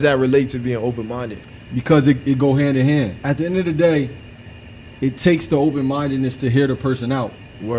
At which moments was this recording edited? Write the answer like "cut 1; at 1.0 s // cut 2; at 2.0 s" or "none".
cut 1; at 3.2 s